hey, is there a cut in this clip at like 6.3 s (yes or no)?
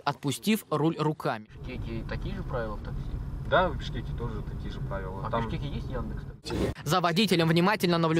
yes